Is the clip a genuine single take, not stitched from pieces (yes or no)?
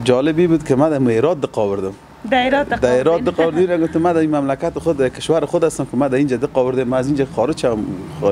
yes